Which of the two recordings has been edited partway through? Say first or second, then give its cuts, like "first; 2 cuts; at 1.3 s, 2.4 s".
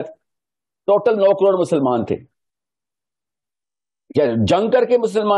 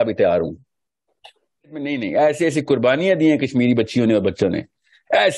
second; 1 cut; at 1.9 s